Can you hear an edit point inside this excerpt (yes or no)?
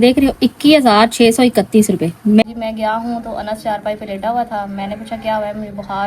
yes